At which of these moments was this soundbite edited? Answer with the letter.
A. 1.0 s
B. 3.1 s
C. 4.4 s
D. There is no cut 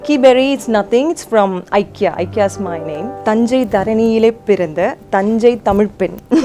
B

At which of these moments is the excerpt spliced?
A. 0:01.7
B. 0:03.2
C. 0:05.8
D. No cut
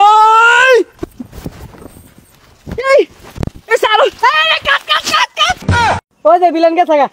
C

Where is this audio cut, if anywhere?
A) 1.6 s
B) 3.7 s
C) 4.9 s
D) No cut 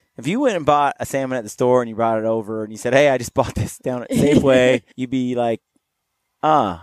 C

